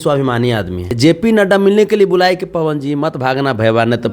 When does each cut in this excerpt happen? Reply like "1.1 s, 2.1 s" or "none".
0.9 s